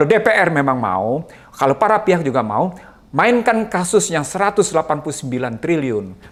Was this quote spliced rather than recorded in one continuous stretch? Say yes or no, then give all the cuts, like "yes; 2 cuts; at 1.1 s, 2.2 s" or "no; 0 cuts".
no; 0 cuts